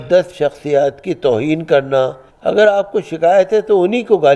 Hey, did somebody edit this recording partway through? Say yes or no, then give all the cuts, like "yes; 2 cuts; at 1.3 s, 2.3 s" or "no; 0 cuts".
yes; 1 cut; at 2.3 s